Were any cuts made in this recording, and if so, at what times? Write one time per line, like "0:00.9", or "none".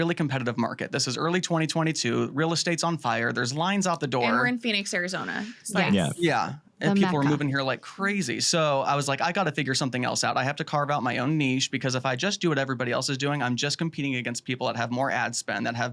none